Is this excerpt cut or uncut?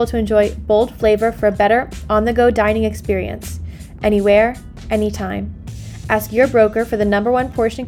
uncut